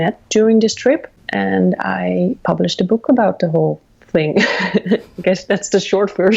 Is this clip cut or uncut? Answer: cut